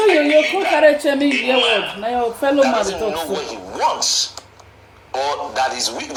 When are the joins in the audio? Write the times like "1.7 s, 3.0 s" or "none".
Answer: none